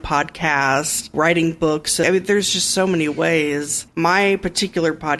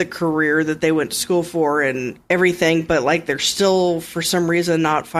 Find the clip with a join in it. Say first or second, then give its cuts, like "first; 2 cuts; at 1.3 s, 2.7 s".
first; 3 cuts; at 1.1 s, 2.0 s, 3.8 s